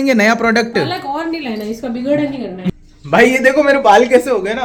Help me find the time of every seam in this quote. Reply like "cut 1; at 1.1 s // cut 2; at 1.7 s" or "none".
none